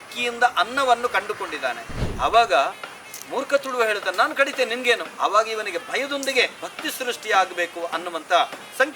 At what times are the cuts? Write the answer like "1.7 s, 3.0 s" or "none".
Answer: 1.9 s, 5.1 s, 6.6 s